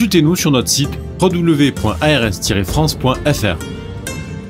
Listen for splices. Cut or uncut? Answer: cut